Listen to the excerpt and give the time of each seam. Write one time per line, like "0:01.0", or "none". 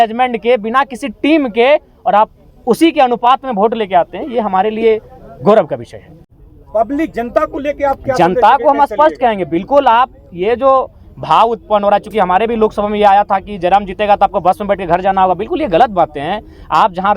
0:06.4